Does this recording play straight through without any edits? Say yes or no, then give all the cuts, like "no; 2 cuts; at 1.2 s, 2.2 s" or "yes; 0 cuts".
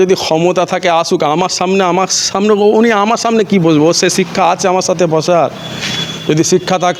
yes; 0 cuts